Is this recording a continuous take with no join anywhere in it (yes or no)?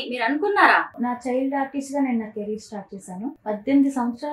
no